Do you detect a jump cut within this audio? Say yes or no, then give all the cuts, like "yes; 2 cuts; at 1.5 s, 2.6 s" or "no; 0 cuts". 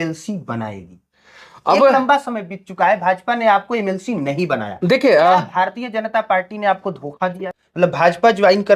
yes; 1 cut; at 7.5 s